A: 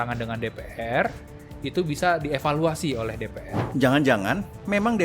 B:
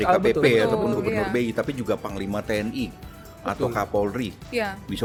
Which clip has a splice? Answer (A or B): A